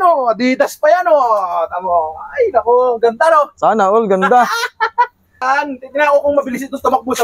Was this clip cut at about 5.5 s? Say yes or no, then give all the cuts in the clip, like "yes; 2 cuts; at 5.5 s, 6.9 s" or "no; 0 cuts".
yes; 1 cut; at 5.5 s